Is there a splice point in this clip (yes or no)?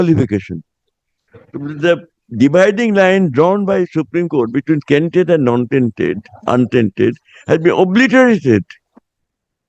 no